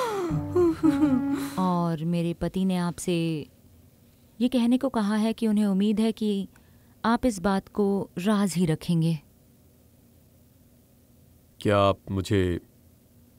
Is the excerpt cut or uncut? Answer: cut